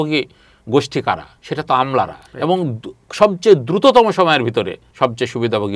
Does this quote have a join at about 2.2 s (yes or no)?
yes